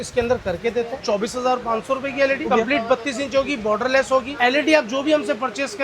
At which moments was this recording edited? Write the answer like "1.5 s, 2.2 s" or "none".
1.0 s, 2.5 s, 4.3 s